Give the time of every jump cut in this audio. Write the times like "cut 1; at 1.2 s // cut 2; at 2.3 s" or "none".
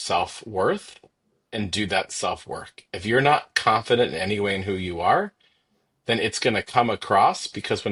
none